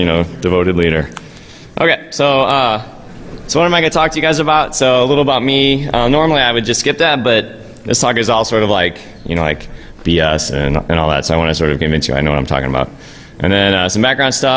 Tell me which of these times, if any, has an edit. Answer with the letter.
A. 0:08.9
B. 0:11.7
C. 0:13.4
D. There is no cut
A